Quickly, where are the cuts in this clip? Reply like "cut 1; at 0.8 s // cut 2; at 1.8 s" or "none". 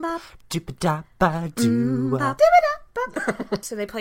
cut 1; at 2.3 s // cut 2; at 3.2 s